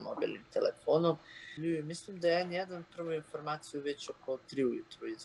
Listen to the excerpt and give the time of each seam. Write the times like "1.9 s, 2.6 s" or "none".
1.6 s